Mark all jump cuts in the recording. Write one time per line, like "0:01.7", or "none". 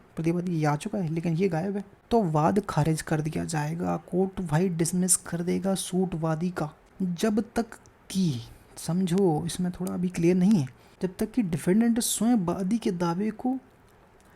0:01.9
0:06.8
0:10.8